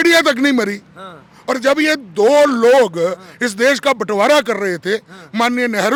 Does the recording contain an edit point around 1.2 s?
no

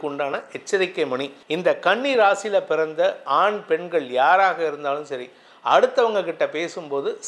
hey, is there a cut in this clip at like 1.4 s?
yes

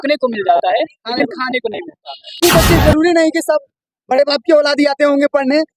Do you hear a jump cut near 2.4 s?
yes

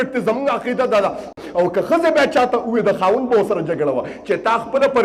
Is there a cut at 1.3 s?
yes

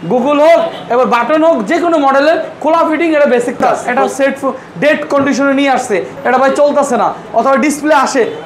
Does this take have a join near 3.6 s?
yes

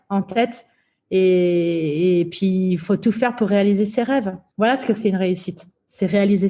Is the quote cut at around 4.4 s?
yes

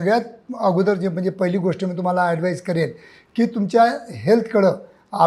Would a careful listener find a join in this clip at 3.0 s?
no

